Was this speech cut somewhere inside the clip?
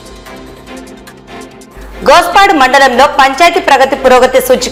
no; 0 cuts

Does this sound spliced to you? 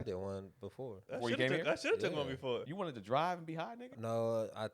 yes; 3 cuts; at 1.0 s, 2.7 s, 3.9 s

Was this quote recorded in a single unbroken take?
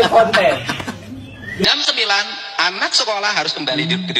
no; 1 cut; at 1.6 s

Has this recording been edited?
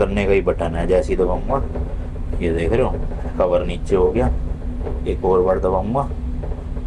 no; 0 cuts

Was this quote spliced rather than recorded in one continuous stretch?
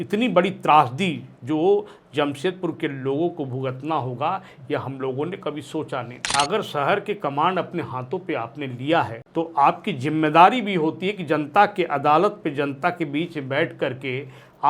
yes; 2 cuts; at 6.2 s, 9.2 s

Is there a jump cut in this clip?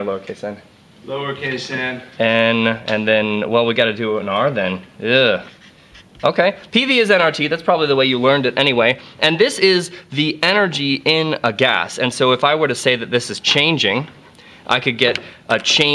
no; 0 cuts

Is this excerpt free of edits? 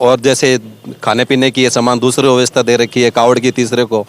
yes; 0 cuts

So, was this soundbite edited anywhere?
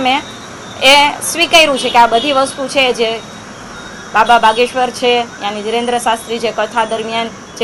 no; 0 cuts

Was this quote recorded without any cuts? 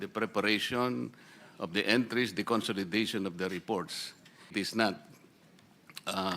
no; 1 cut; at 4.5 s

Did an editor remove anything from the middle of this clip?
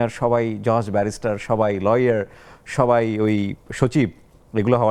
no; 0 cuts

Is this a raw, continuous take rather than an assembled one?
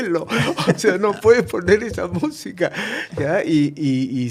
yes; 0 cuts

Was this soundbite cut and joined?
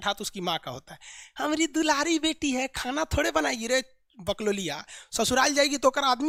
no; 0 cuts

